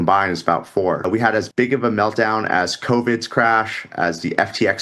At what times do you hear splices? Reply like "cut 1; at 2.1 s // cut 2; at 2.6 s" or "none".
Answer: cut 1; at 1.1 s